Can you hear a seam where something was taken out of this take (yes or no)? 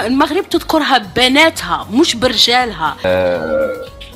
yes